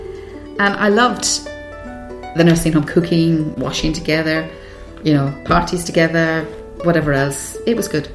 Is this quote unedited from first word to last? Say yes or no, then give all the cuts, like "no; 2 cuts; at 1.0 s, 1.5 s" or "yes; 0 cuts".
yes; 0 cuts